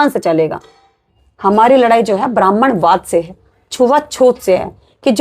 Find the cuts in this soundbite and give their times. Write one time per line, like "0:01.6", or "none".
0:01.1